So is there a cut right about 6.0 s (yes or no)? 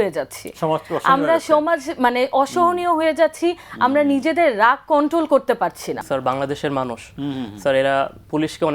yes